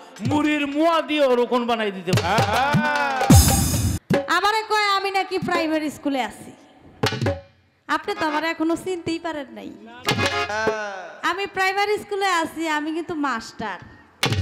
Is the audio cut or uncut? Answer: cut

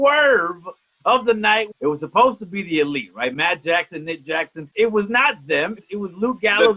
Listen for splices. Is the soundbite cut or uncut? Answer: cut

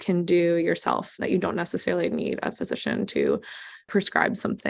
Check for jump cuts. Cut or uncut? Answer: cut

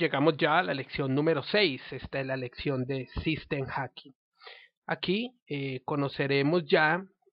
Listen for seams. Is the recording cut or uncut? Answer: uncut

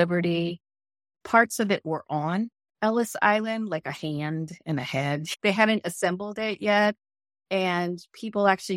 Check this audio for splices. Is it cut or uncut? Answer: cut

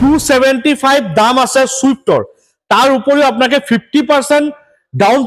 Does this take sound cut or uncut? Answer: uncut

